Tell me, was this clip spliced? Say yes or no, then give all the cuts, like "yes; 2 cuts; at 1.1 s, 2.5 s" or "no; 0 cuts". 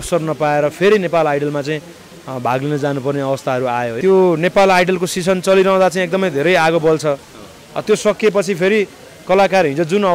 yes; 1 cut; at 4.0 s